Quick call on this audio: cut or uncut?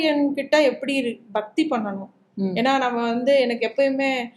uncut